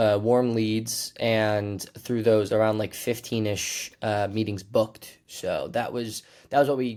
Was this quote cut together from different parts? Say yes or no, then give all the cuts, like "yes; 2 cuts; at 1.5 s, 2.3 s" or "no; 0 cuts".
no; 0 cuts